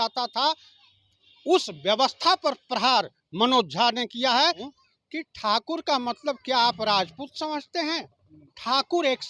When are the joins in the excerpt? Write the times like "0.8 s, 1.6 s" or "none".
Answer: 4.7 s